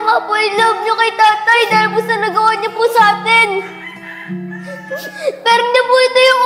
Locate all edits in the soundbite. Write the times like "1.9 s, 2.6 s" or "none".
none